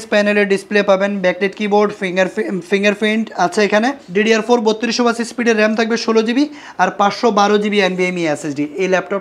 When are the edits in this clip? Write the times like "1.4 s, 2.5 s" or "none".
4.0 s